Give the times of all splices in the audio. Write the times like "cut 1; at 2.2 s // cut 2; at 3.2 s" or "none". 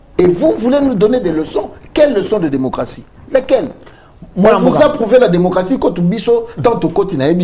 none